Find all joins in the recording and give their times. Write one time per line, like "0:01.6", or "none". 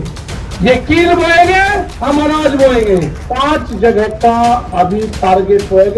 0:03.3

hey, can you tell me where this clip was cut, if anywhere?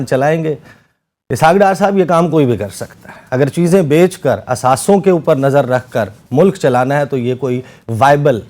none

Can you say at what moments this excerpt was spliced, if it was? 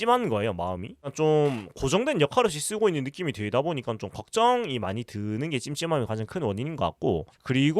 0:01.0

